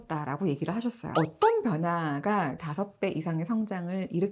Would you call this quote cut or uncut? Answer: cut